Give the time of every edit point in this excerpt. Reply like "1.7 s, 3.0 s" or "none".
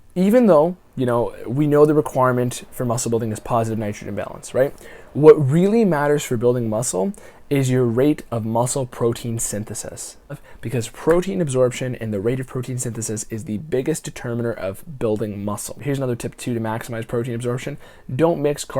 10.4 s, 15.8 s